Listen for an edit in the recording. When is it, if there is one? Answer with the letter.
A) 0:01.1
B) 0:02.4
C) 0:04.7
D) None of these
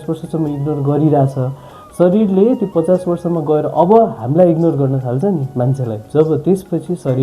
D